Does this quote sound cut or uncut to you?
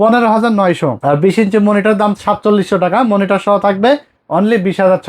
cut